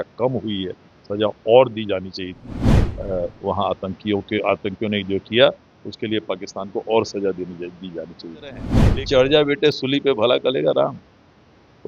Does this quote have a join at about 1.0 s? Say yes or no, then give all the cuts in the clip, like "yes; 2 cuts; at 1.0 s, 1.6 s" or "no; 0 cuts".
no; 1 cut; at 8.7 s